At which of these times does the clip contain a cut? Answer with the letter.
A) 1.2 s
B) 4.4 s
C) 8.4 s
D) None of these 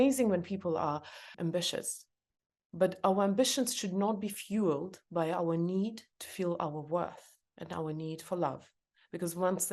A